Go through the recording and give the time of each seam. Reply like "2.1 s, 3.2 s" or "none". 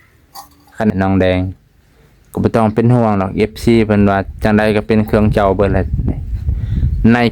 0.9 s